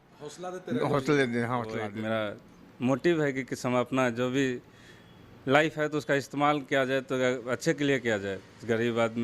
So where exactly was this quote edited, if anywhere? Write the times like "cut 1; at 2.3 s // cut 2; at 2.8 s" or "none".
cut 1; at 1.9 s